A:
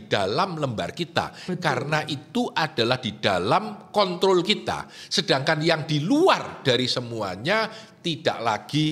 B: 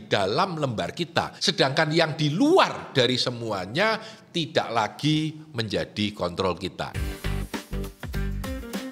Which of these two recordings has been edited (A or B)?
B